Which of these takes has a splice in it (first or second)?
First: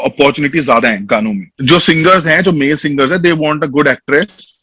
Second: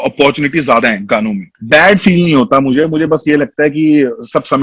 second